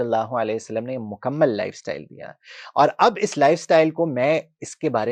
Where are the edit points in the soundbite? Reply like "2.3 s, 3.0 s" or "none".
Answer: none